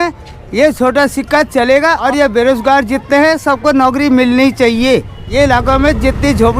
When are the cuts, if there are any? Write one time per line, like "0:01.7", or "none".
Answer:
0:02.0
0:05.2